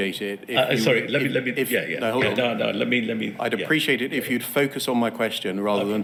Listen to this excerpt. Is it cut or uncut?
uncut